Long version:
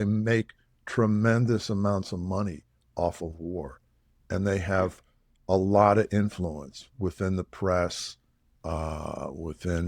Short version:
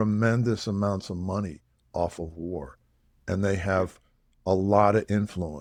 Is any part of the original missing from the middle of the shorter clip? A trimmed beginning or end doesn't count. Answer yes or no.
no